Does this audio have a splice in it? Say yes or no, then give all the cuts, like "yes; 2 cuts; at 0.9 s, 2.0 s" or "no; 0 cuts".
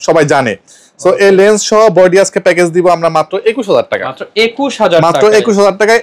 no; 0 cuts